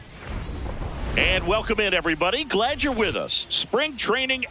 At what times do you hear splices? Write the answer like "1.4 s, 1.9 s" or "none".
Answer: 1.2 s